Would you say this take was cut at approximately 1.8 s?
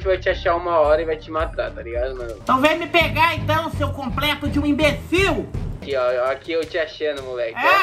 yes; 2 cuts; at 1.8 s, 5.8 s

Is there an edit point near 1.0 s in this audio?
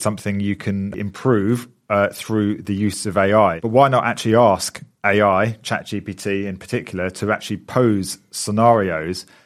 yes; 2 cuts; at 1.0 s, 3.6 s

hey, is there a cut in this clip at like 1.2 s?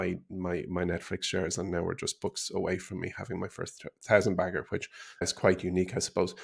no; 1 cut; at 5.3 s

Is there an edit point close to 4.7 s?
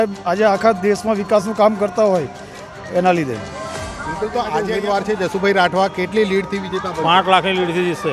yes; 1 cut; at 4.7 s

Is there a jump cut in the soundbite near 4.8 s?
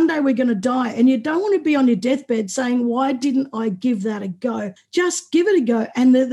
yes; 1 cut; at 4.8 s

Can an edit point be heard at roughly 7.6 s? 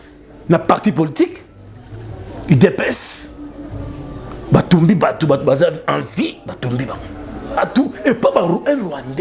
yes; 1 cut; at 7.6 s

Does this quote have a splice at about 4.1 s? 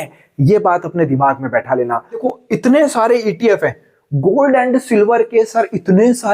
no; 1 cut; at 2.2 s

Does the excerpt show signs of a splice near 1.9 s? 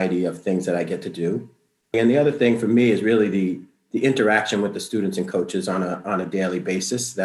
yes; 1 cut; at 1.9 s

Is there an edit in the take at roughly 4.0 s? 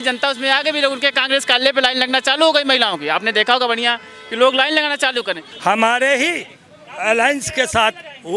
no; 1 cut; at 5.4 s

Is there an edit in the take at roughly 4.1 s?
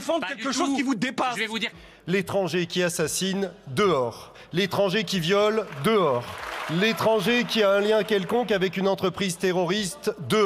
no; 1 cut; at 1.7 s

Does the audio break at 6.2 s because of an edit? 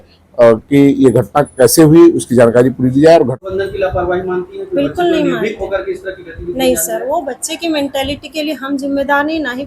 no; 1 cut; at 3.4 s

